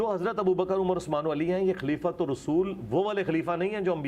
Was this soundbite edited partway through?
no; 0 cuts

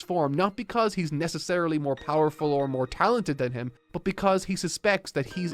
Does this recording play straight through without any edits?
yes; 0 cuts

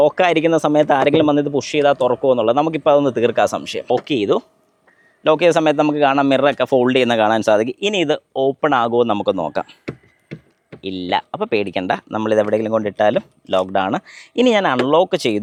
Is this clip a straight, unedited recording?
yes; 0 cuts

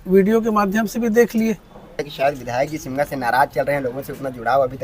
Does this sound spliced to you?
yes; 1 cut; at 2.0 s

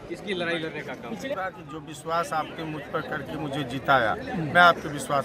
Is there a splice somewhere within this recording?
yes; 1 cut; at 1.3 s

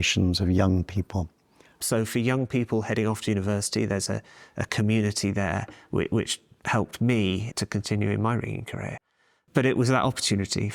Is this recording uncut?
no; 2 cuts; at 1.8 s, 7.5 s

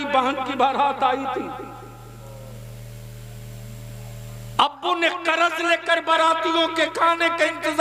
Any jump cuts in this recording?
no; 0 cuts

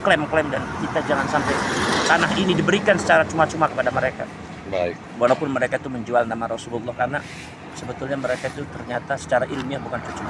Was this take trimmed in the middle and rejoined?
no; 0 cuts

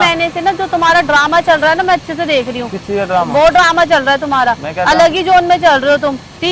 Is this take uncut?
yes; 0 cuts

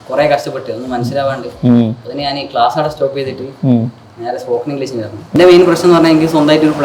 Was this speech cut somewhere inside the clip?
yes; 1 cut; at 5.3 s

